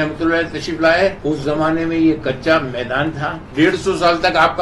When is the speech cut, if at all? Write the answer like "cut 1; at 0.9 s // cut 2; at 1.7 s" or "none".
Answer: cut 1; at 1.2 s // cut 2; at 3.4 s